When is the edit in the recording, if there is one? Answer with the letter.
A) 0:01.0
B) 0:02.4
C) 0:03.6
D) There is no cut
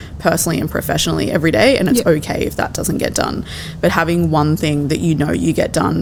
D